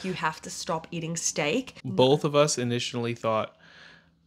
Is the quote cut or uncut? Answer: cut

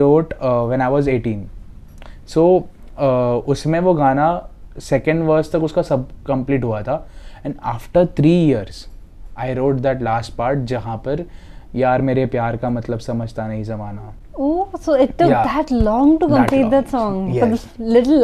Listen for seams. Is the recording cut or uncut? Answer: uncut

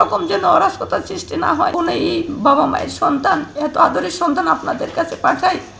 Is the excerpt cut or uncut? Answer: cut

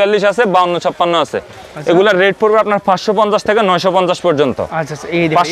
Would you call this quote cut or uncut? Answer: uncut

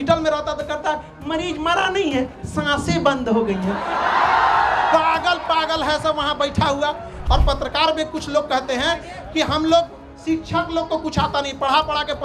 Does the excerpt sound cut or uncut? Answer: cut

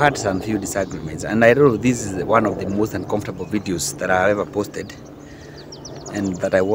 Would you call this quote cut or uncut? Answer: uncut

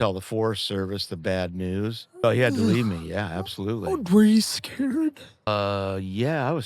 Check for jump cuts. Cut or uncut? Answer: cut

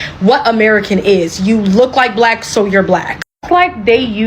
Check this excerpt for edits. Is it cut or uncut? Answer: uncut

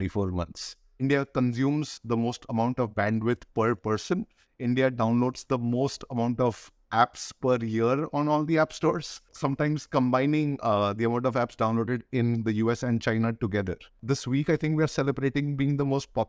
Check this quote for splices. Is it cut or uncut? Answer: cut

